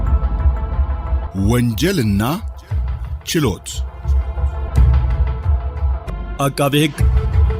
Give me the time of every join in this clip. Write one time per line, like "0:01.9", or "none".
none